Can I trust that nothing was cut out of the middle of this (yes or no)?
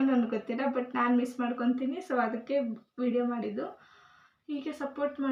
yes